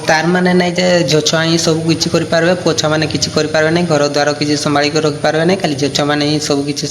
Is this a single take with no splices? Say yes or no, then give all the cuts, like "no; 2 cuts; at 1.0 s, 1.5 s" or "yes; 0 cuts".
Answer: yes; 0 cuts